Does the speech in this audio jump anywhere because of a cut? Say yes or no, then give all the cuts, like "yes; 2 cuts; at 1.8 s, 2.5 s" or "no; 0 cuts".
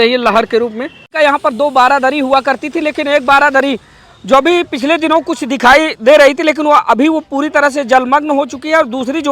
yes; 1 cut; at 1.1 s